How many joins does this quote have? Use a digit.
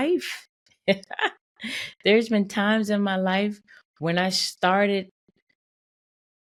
0